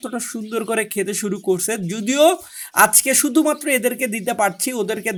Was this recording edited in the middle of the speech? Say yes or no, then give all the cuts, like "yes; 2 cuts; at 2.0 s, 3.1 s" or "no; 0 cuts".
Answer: no; 0 cuts